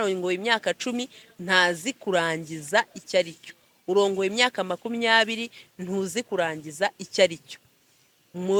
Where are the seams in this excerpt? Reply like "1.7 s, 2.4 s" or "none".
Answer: none